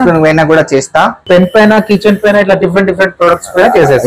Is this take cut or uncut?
cut